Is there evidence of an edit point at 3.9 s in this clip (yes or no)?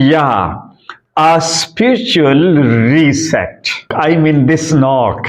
yes